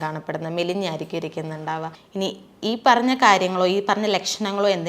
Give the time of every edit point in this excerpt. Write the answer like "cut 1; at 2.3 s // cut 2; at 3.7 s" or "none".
cut 1; at 2.0 s